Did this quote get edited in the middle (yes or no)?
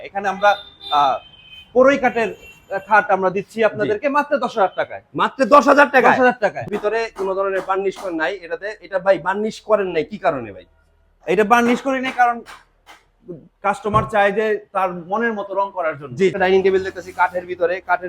yes